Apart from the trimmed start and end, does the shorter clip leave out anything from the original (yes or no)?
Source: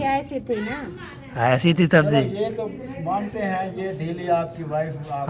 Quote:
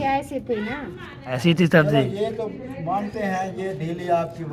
yes